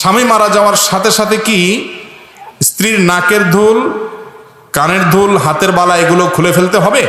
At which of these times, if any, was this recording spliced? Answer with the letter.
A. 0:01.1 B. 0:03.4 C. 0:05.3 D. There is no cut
D